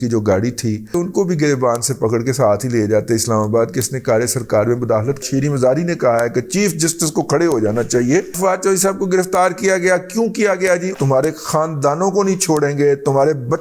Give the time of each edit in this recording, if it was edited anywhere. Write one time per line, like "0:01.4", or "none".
0:00.9
0:05.2
0:08.3
0:10.9